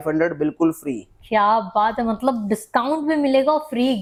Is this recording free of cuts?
yes; 0 cuts

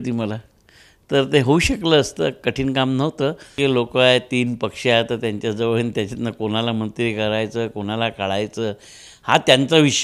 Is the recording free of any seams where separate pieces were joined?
no; 1 cut; at 3.5 s

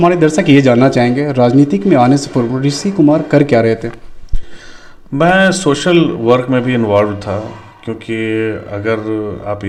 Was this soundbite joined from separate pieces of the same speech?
no; 0 cuts

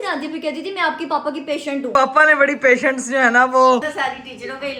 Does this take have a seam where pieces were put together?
yes; 2 cuts; at 1.9 s, 3.8 s

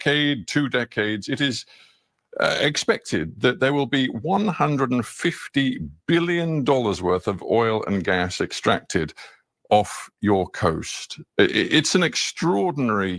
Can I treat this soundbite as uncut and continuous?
yes; 0 cuts

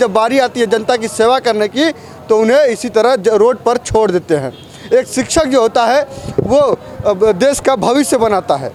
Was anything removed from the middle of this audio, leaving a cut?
no; 0 cuts

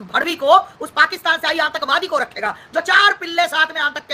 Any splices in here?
no; 0 cuts

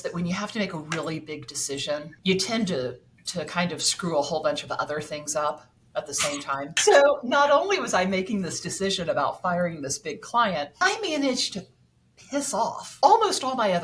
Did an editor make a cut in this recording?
yes; 3 cuts; at 6.7 s, 10.7 s, 12.8 s

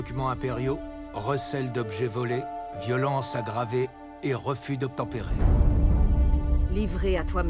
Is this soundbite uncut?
no; 1 cut; at 5.2 s

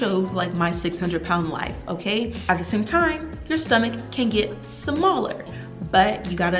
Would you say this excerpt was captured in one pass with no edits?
yes; 0 cuts

